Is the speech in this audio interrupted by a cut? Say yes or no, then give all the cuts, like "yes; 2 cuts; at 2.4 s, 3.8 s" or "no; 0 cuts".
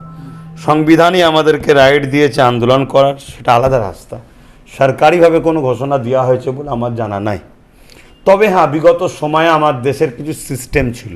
no; 0 cuts